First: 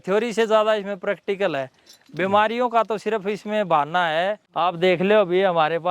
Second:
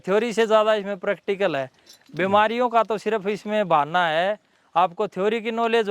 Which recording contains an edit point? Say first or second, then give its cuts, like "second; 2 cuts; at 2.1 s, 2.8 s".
first; 1 cut; at 4.5 s